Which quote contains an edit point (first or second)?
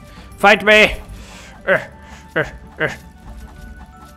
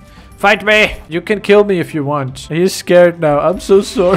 second